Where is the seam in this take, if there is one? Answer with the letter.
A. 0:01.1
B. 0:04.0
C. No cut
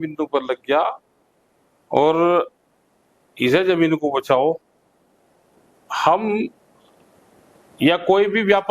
C